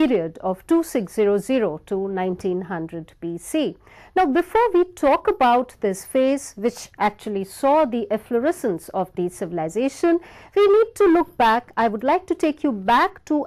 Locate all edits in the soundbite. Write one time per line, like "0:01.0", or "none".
0:04.5